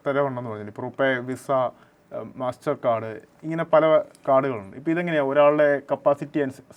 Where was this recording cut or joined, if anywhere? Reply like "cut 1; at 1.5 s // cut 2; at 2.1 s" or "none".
none